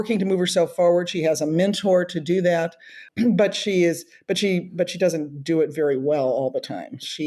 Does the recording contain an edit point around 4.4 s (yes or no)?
no